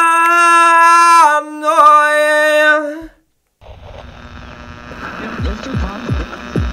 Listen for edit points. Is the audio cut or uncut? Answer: uncut